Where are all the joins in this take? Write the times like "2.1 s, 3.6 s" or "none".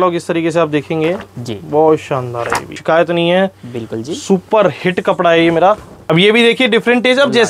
2.8 s, 5.9 s